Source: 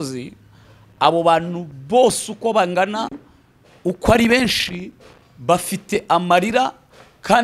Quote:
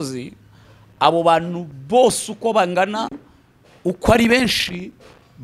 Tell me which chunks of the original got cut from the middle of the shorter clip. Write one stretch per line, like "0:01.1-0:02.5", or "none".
none